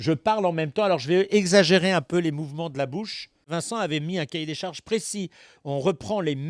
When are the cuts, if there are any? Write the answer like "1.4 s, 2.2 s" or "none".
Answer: 3.5 s